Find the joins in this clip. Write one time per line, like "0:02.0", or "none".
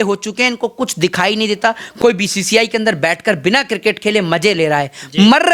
0:01.9